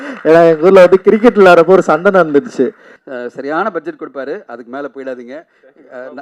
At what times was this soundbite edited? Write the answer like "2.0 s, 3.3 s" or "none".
2.9 s